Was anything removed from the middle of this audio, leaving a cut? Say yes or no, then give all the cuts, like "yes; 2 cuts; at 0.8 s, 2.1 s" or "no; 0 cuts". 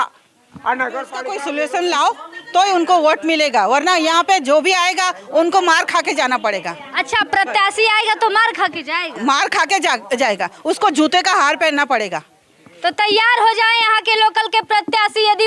yes; 1 cut; at 1.4 s